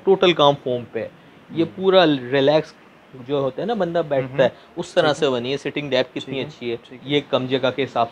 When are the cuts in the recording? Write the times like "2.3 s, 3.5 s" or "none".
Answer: 6.9 s